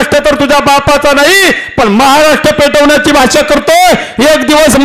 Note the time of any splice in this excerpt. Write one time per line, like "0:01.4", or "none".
none